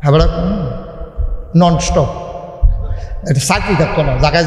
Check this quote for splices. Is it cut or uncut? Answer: uncut